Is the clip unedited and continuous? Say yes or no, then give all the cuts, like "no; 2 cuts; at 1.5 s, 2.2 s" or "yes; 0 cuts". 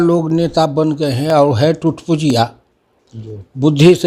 yes; 0 cuts